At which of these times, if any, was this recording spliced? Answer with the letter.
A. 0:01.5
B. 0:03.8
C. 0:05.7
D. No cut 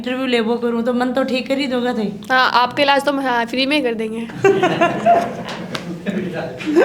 D